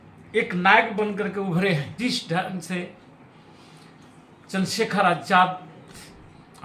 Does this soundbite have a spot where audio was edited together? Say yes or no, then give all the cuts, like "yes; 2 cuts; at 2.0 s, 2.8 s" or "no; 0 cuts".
yes; 1 cut; at 1.9 s